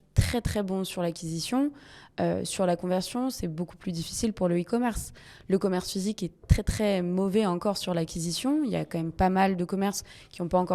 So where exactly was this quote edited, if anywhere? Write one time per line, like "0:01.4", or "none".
none